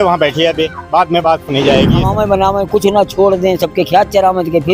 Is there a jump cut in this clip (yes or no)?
yes